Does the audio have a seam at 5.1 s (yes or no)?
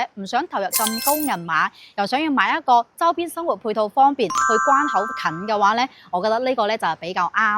yes